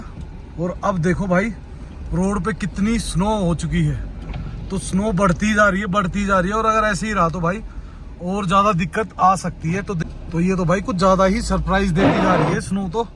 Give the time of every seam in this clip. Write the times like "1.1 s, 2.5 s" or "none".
10.0 s